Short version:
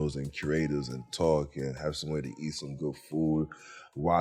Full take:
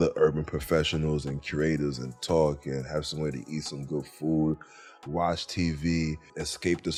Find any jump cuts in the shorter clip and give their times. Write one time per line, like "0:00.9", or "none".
none